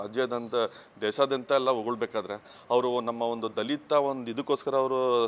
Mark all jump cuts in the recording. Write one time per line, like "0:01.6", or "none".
none